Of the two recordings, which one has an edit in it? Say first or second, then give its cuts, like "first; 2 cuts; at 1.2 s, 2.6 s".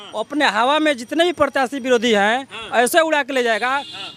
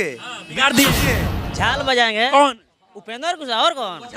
second; 1 cut; at 1.4 s